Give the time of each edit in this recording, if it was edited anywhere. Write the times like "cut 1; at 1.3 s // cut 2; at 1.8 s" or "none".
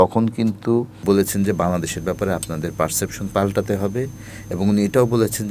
cut 1; at 1.0 s